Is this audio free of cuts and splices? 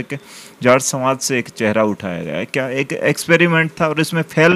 yes; 0 cuts

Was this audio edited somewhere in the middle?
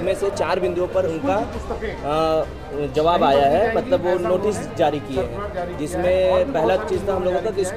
no; 0 cuts

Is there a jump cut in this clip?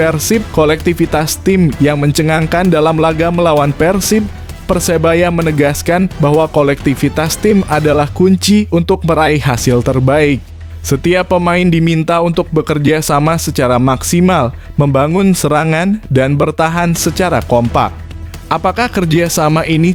no; 0 cuts

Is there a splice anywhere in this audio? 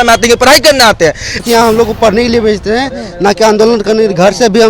yes; 1 cut; at 1.4 s

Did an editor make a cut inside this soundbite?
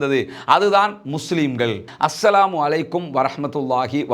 yes; 1 cut; at 1.9 s

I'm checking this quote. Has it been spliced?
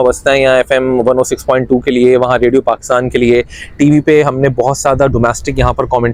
no; 0 cuts

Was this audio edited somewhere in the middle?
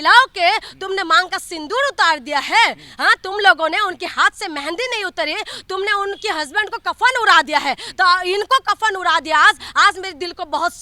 no; 0 cuts

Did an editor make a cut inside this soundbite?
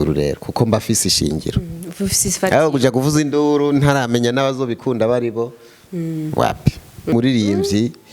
yes; 1 cut; at 7.0 s

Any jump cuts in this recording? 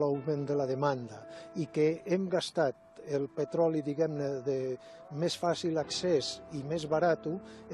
no; 0 cuts

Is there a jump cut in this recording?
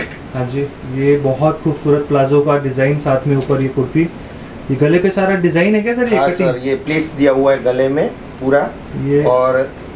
no; 0 cuts

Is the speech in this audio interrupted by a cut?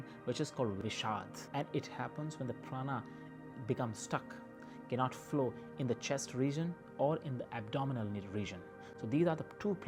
no; 0 cuts

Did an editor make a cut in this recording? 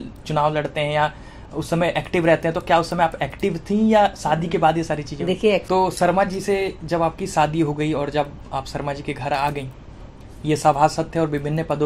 yes; 1 cut; at 5.6 s

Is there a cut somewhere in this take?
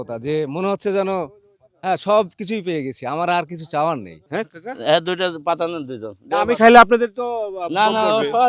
yes; 1 cut; at 4.1 s

